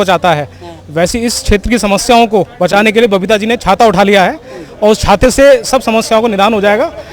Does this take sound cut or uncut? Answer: uncut